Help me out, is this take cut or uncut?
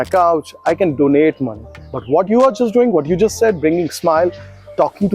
uncut